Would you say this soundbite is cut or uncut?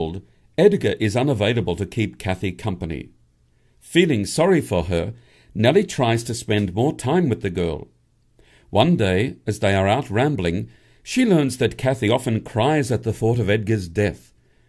cut